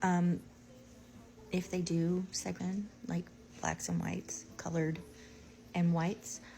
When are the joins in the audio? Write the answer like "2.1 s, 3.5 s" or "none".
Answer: 2.6 s

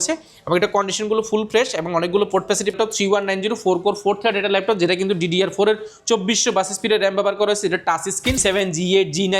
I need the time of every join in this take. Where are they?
2.7 s, 8.4 s

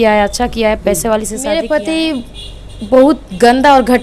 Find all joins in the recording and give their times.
1.5 s

